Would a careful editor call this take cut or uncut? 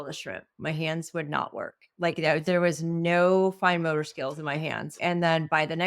cut